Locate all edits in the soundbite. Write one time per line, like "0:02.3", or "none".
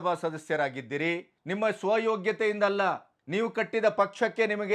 0:01.3
0:03.1